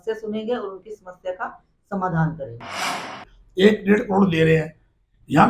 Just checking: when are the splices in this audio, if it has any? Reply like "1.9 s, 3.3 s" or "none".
2.8 s